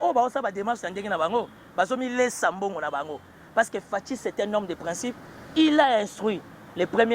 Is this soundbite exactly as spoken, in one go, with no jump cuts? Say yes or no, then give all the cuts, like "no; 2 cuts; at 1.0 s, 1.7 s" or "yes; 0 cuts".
yes; 0 cuts